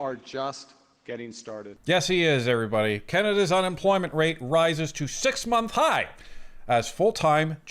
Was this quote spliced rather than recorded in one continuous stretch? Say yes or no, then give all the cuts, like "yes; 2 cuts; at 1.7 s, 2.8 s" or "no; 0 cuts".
yes; 1 cut; at 1.7 s